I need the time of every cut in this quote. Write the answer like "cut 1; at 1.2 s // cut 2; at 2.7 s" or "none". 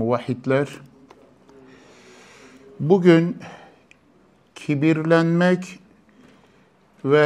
none